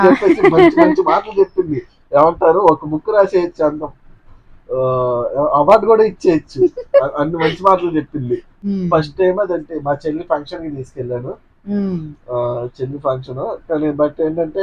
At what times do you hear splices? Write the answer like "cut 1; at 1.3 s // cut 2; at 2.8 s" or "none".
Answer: cut 1; at 8.5 s